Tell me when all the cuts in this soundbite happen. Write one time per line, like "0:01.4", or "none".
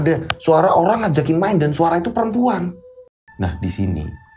0:03.0